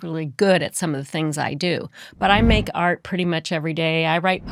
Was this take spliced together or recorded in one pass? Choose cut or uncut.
uncut